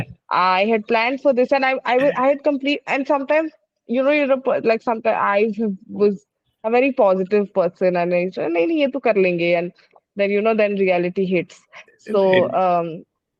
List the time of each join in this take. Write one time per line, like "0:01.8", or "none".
none